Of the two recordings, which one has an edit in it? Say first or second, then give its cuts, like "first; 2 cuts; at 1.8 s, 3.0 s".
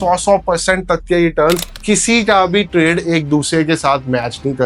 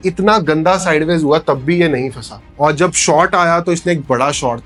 first; 1 cut; at 1.7 s